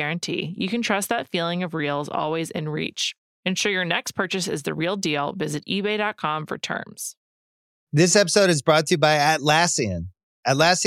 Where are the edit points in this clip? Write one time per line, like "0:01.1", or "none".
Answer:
0:07.2

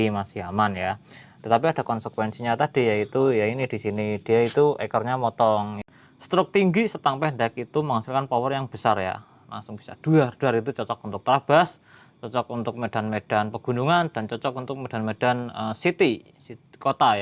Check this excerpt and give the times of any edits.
0:05.9

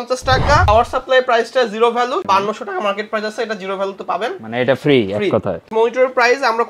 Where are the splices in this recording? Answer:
0:00.7
0:02.2
0:05.6

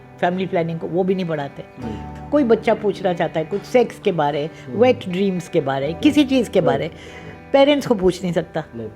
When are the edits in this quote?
0:02.0

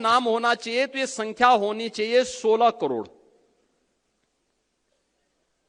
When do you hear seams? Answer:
none

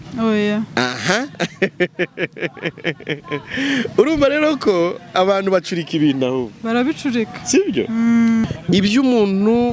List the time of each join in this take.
0:08.4

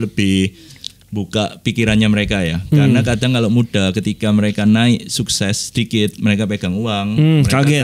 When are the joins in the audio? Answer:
none

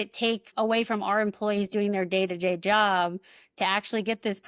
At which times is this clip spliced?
none

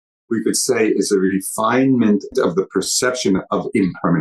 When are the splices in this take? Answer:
0:02.3

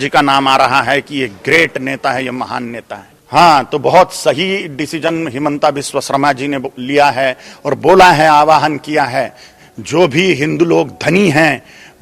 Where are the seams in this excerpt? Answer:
none

